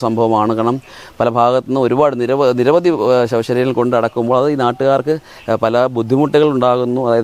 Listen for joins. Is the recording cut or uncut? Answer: uncut